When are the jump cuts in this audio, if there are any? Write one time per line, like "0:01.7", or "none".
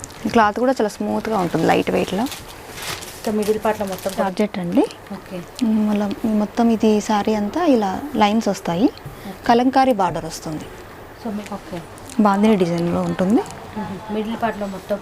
0:04.2
0:11.4